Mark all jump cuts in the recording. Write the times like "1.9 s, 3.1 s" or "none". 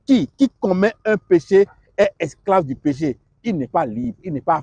none